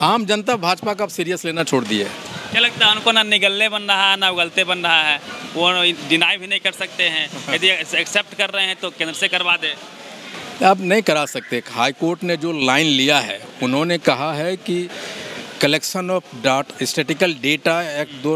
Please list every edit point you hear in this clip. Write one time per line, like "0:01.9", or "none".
none